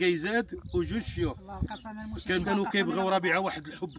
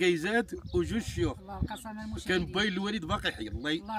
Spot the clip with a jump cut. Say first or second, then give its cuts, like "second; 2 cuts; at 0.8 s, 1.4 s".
first; 1 cut; at 2.4 s